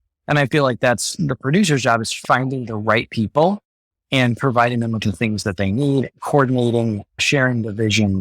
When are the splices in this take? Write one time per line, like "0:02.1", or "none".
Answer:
0:02.1
0:07.1